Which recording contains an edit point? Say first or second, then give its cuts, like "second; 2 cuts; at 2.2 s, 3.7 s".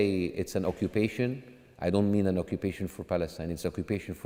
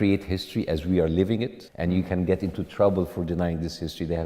second; 1 cut; at 1.6 s